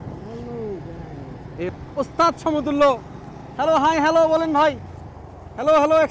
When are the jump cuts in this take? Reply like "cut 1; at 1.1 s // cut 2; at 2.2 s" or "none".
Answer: cut 1; at 1.7 s